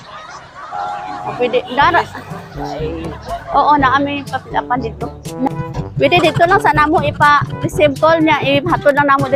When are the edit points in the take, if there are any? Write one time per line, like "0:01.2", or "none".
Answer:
none